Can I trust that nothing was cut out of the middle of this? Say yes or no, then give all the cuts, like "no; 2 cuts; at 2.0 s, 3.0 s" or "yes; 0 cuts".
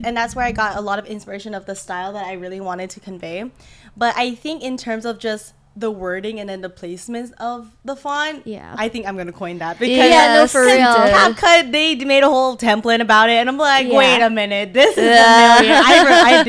yes; 0 cuts